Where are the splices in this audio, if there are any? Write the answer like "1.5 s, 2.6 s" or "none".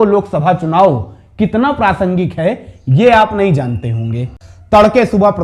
4.4 s

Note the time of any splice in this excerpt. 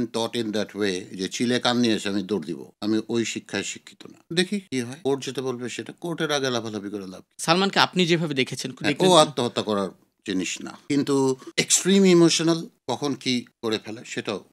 none

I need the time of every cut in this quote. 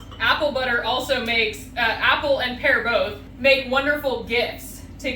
3.2 s

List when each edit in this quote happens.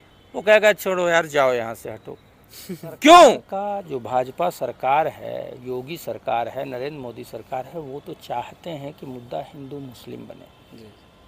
3.4 s

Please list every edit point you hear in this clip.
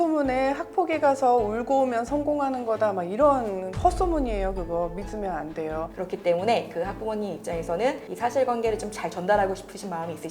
5.9 s, 8.1 s

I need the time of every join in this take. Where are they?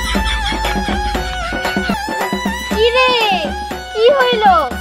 2.0 s

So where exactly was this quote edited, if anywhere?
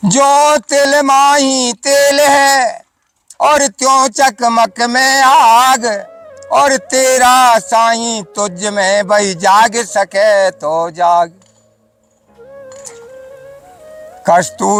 none

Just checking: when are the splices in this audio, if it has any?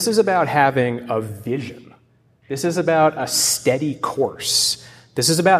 none

